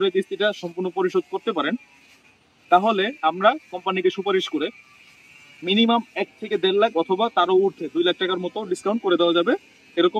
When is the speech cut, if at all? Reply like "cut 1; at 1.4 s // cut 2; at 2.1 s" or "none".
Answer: none